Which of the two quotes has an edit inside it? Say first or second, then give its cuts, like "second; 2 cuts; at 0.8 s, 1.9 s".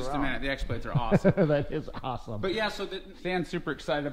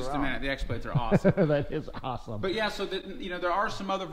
first; 1 cut; at 3.0 s